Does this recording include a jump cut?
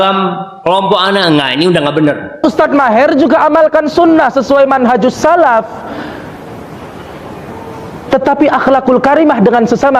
yes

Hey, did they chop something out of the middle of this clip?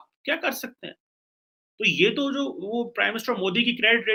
no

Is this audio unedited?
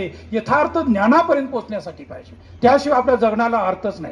yes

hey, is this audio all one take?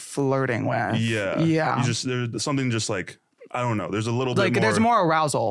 yes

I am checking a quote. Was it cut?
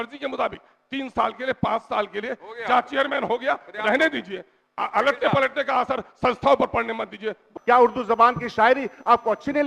yes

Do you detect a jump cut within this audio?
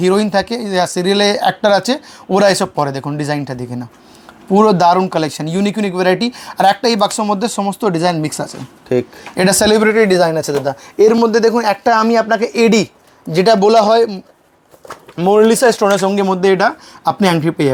no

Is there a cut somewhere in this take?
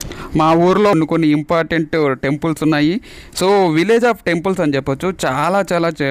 yes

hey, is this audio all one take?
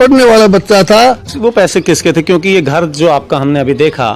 no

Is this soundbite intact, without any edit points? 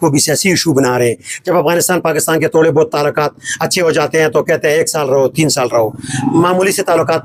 yes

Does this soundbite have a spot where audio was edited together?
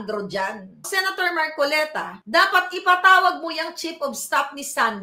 no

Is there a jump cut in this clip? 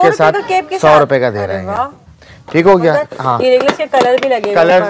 no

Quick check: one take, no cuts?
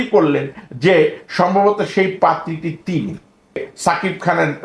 no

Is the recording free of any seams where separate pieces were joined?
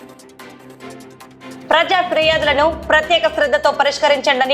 yes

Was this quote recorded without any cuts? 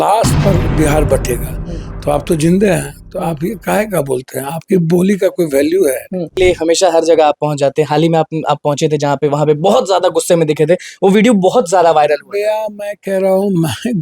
no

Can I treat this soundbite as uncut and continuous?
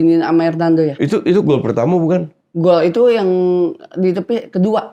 yes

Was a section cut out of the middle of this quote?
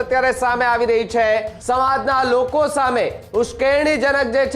yes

